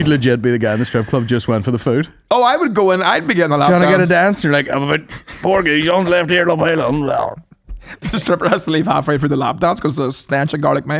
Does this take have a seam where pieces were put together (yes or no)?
no